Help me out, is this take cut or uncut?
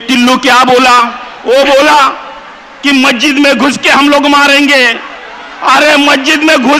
cut